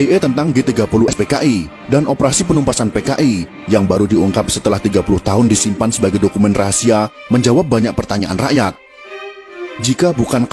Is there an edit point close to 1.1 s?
yes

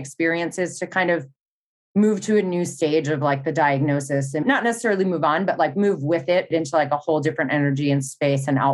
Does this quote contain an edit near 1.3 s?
no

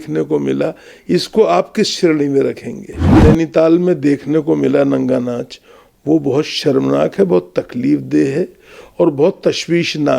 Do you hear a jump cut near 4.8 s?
no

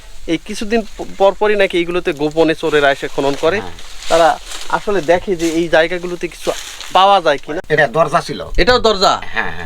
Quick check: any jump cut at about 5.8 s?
no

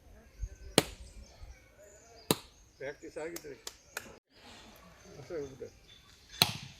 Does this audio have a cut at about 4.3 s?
yes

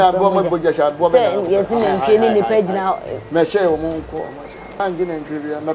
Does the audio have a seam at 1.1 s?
no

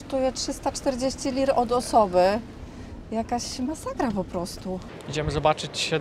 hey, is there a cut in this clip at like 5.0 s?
yes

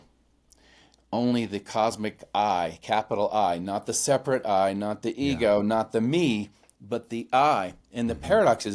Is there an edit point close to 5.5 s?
no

